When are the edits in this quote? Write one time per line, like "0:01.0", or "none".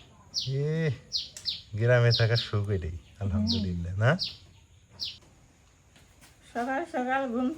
0:05.3